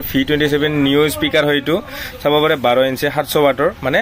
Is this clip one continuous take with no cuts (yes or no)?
yes